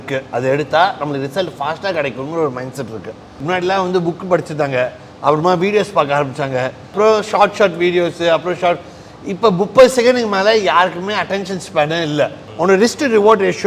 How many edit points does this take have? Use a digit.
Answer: 3